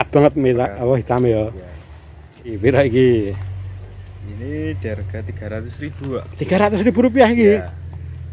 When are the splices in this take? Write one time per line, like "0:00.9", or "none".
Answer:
0:02.6